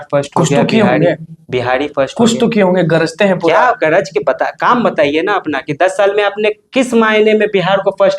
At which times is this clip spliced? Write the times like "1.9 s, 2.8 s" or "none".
none